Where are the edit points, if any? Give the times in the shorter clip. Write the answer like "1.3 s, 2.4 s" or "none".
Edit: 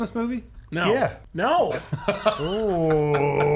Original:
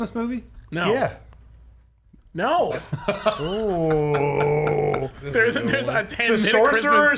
1.2 s

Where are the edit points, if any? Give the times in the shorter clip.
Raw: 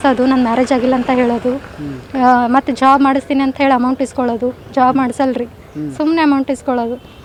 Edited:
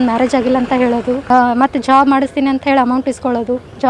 1.2 s

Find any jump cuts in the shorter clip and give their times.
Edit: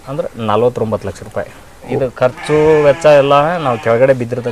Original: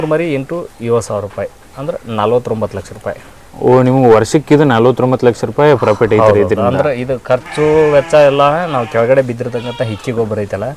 1.9 s

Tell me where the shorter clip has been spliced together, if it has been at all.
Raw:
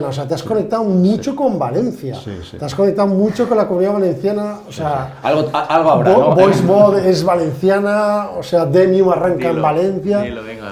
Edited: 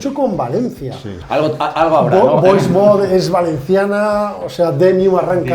1.2 s

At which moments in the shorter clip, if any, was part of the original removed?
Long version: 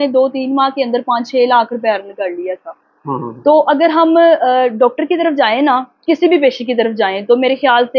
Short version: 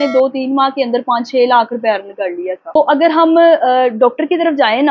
2.8 s

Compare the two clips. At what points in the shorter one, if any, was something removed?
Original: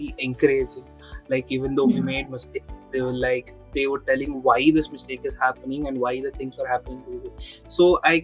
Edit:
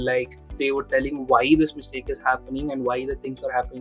none

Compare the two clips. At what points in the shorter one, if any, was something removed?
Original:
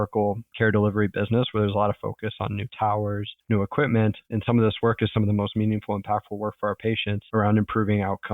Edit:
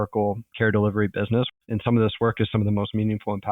1.5 s

